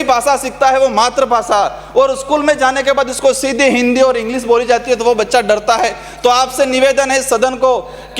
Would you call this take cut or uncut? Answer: uncut